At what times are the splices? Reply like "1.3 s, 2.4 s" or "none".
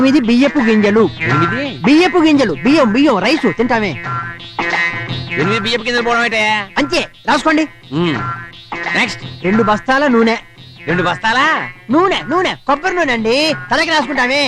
none